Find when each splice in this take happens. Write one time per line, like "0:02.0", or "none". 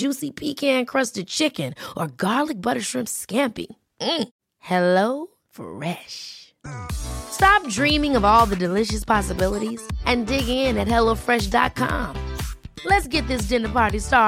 none